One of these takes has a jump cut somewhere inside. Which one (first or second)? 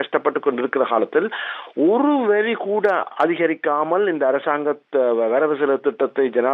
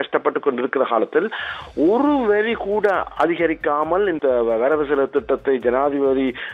second